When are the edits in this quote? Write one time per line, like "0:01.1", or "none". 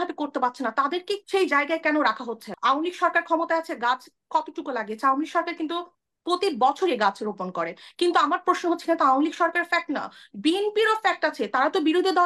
0:01.2
0:02.5